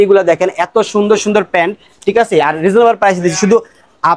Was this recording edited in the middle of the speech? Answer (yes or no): no